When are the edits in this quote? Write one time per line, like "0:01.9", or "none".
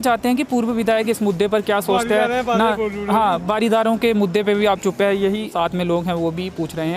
0:05.5

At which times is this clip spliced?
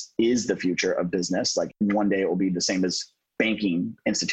0:01.8

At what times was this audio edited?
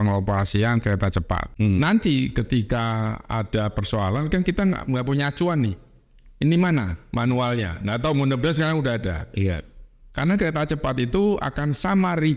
0:01.5

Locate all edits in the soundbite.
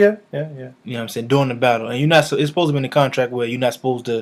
none

